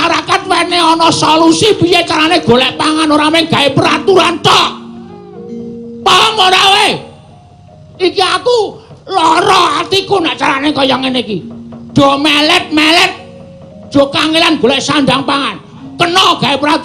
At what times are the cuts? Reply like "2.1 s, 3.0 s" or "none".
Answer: 15.8 s